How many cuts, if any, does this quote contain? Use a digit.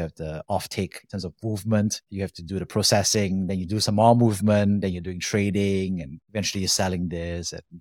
0